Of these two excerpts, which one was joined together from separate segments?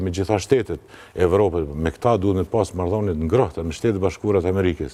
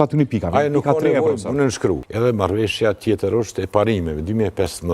second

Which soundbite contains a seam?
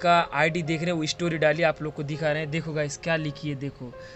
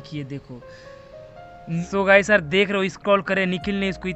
second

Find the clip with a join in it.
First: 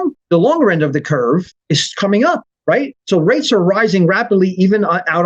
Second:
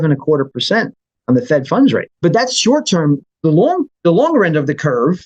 second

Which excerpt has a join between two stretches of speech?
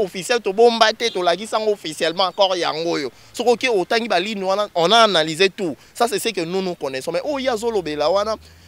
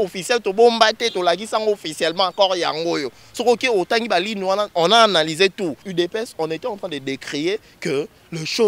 second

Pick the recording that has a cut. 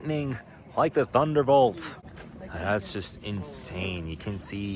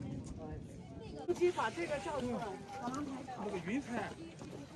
second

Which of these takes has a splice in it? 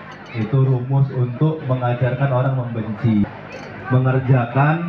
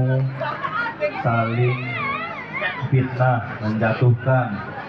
first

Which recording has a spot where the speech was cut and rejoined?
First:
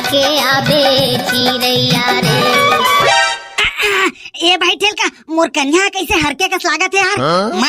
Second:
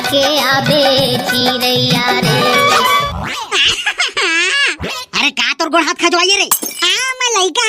second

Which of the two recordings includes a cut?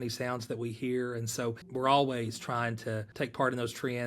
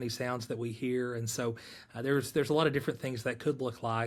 first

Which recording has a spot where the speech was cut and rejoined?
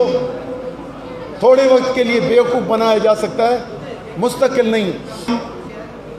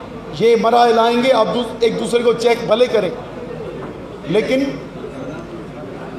first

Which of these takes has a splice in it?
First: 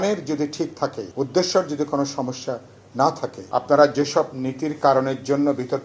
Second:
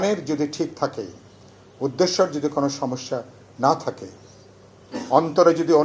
first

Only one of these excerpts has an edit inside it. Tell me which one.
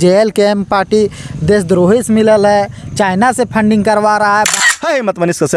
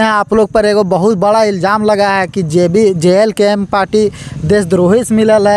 first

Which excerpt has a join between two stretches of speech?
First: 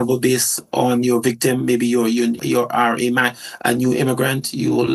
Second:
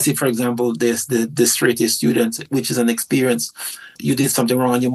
second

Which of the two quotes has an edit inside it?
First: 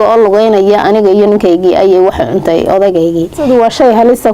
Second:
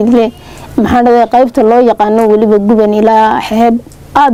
first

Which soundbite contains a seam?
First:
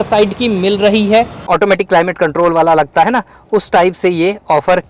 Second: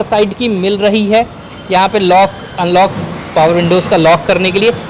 first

